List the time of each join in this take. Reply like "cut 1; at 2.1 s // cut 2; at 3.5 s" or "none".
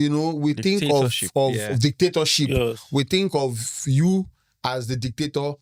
none